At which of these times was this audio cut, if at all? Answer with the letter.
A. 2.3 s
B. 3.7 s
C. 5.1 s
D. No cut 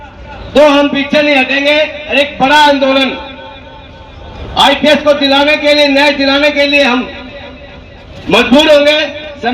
D